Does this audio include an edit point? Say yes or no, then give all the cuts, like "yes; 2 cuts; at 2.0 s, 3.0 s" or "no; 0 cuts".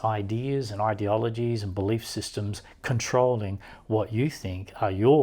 no; 0 cuts